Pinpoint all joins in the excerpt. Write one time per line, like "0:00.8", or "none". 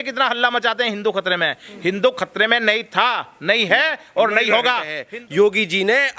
0:05.0